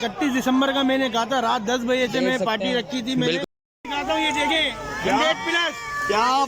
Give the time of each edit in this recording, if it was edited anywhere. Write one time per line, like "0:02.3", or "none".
0:03.4